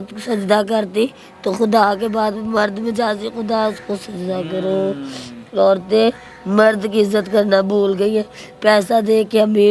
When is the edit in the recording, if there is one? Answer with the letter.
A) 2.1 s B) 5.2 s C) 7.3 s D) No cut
D